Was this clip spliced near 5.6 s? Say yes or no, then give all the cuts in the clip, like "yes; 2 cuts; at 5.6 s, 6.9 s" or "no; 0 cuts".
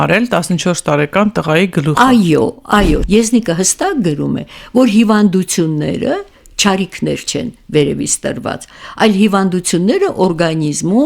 no; 1 cut; at 3.0 s